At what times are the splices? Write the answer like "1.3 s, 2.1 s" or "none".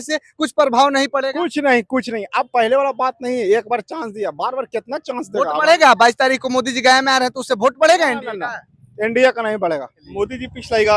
10.0 s